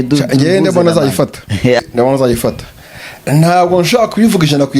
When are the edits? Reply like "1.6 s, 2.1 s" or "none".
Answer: 1.8 s